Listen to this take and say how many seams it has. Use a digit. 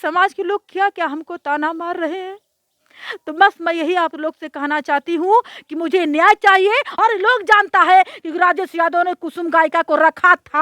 1